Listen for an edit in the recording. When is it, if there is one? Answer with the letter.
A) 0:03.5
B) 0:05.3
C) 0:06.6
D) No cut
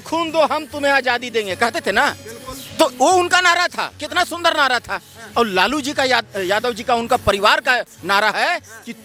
D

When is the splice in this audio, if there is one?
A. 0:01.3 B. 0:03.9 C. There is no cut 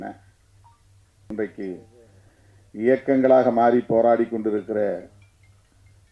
A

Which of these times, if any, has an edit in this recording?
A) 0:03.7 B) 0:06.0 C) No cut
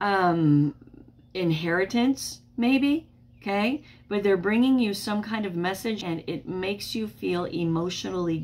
B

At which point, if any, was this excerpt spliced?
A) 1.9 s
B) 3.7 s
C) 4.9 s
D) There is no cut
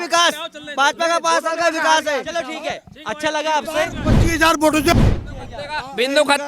C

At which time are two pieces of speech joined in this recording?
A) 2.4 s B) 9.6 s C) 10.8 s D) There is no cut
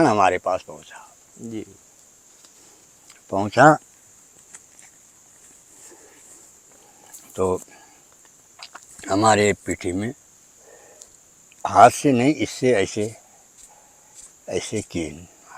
D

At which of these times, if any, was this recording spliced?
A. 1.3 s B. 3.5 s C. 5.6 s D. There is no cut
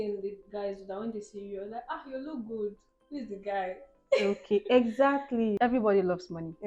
C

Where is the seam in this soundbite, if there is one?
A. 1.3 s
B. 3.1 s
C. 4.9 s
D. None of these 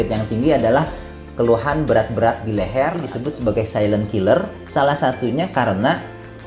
B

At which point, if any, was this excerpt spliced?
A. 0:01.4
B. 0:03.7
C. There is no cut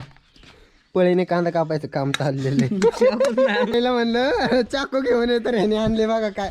B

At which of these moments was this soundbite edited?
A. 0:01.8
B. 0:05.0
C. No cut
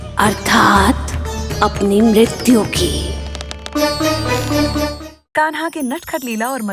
B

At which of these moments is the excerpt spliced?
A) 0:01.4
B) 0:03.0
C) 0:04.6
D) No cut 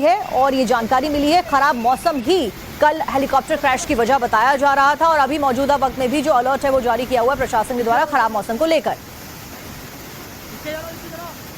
C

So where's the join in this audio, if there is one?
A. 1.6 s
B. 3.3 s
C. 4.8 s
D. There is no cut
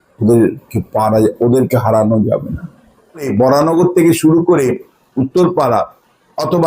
B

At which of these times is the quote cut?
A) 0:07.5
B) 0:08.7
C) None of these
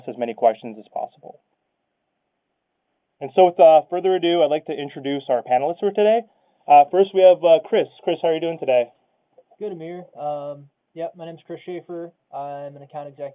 B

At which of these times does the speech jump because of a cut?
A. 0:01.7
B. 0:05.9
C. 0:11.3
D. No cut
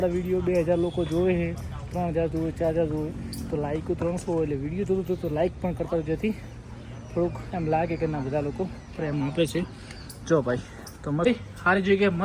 C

